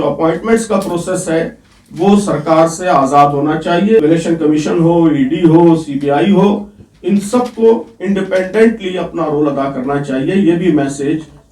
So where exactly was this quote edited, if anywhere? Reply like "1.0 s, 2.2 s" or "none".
4.0 s